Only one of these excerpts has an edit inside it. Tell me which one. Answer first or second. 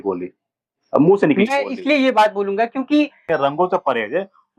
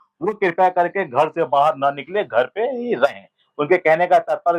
first